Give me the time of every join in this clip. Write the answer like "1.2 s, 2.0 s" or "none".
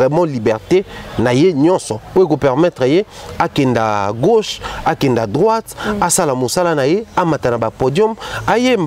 none